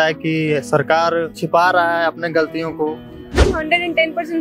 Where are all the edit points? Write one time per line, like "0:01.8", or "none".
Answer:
0:01.4
0:03.4